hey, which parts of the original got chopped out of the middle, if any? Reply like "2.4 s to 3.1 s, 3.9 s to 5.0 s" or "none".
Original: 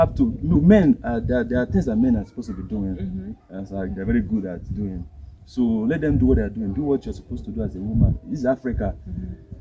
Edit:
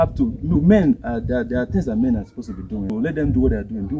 2.9 s to 5.8 s